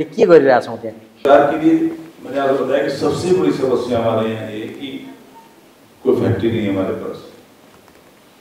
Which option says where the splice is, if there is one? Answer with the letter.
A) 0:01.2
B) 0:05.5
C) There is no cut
A